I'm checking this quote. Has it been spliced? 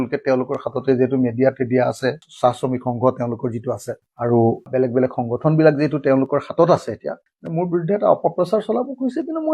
yes; 1 cut; at 4.0 s

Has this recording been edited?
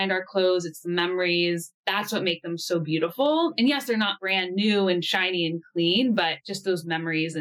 yes; 2 cuts; at 1.7 s, 6.4 s

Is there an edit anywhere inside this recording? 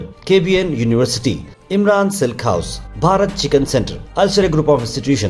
no; 0 cuts

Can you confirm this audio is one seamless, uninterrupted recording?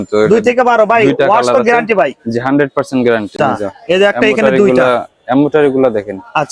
no; 1 cut; at 3.3 s

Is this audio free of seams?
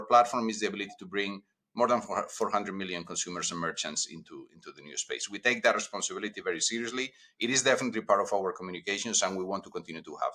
yes; 0 cuts

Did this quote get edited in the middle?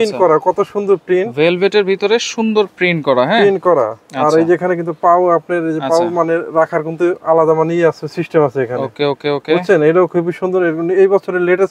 no; 0 cuts

